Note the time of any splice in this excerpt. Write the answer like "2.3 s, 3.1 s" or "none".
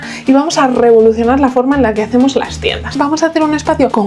2.9 s